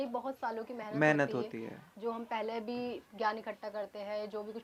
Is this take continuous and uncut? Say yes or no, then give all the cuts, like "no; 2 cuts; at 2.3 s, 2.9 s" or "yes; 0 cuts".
yes; 0 cuts